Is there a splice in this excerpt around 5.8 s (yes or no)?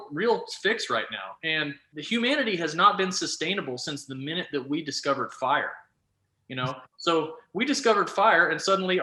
no